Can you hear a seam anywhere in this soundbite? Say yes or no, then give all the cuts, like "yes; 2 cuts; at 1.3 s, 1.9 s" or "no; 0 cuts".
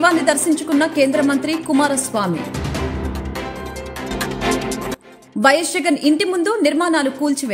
no; 0 cuts